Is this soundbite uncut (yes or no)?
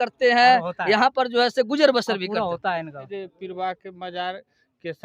no